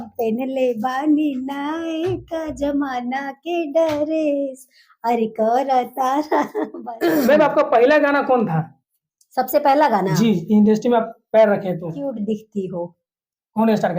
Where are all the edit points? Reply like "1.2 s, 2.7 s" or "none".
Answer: 6.6 s, 12.2 s